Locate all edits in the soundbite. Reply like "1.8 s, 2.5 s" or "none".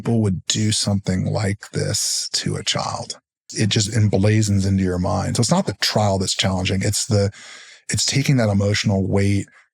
3.5 s

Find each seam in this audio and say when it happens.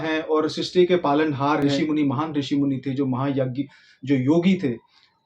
1.7 s

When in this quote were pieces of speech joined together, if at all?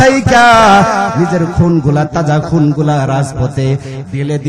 1.1 s

